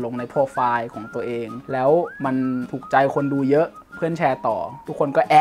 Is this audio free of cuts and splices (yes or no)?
no